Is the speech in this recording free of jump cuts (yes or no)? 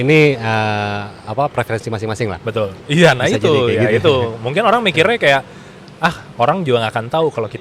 no